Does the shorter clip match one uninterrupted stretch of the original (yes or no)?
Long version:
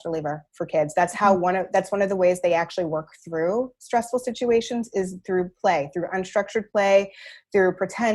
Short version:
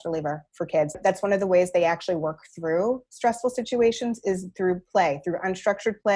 no